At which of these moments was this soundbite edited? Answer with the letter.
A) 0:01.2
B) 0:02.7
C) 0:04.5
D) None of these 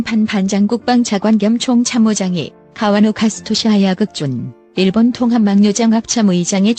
D